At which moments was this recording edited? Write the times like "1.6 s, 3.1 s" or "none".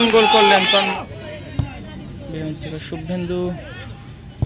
1.0 s